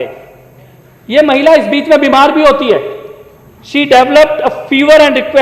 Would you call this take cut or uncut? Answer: uncut